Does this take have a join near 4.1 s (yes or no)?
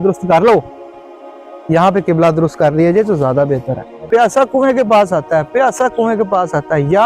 yes